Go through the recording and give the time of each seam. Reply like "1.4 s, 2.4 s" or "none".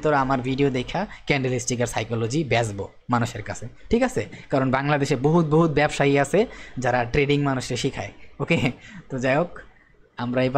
none